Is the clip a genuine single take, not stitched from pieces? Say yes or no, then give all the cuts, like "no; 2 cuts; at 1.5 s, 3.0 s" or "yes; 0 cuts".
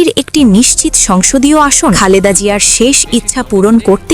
no; 1 cut; at 2.0 s